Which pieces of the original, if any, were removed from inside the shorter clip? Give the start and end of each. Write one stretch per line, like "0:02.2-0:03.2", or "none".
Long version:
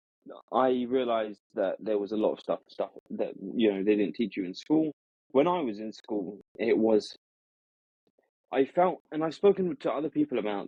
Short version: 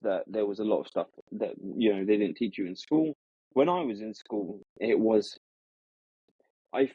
0:02.7-0:02.9